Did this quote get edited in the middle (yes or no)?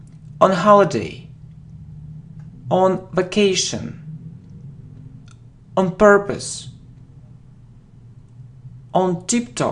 no